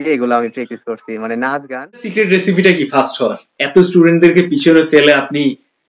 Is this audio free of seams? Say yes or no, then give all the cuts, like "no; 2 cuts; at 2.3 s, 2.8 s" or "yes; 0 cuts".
no; 1 cut; at 2.1 s